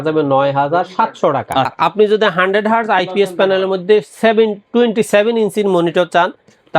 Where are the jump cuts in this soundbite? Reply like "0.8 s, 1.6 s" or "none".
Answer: 1.7 s